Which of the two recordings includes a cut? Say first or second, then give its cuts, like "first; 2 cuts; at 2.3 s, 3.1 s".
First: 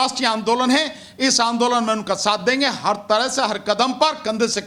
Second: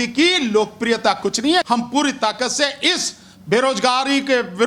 second; 1 cut; at 1.6 s